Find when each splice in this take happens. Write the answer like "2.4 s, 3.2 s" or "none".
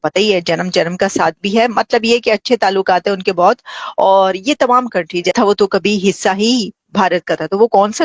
5.3 s